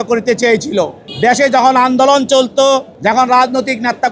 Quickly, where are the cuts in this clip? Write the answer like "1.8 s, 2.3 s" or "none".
1.0 s, 2.9 s